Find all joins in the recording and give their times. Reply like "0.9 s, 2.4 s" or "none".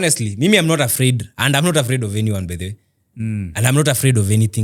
none